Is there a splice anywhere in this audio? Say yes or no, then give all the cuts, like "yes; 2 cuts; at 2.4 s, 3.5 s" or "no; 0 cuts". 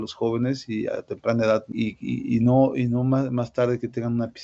yes; 1 cut; at 1.7 s